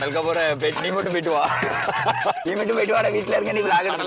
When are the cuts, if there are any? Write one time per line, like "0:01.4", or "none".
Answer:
0:02.4